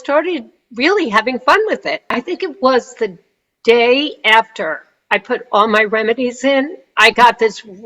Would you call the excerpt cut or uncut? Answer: cut